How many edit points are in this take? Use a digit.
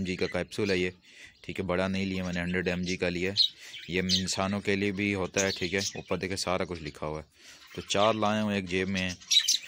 0